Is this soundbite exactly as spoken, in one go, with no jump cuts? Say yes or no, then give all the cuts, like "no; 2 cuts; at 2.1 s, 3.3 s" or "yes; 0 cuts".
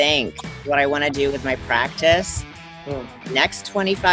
yes; 0 cuts